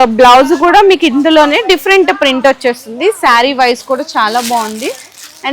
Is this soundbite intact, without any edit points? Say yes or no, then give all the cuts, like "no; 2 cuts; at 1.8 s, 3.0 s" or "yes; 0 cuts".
yes; 0 cuts